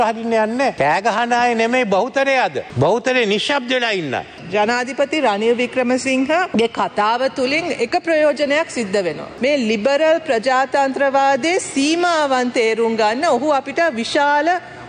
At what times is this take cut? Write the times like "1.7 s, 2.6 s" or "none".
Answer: 0.8 s, 2.6 s, 4.4 s, 6.5 s, 9.3 s